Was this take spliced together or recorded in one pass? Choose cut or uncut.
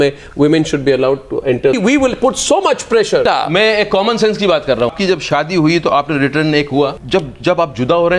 cut